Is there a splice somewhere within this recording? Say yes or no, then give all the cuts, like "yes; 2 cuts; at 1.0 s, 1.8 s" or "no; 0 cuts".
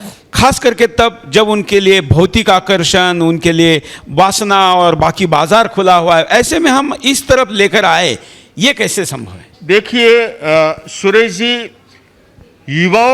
no; 0 cuts